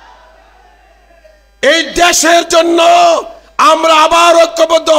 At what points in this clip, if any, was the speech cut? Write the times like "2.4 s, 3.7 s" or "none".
none